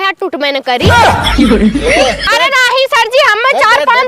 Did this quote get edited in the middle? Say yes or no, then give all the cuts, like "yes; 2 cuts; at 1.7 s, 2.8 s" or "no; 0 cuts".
yes; 1 cut; at 2.3 s